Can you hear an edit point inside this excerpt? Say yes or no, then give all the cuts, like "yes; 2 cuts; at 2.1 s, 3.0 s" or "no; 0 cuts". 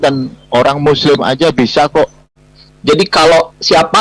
yes; 1 cut; at 2.3 s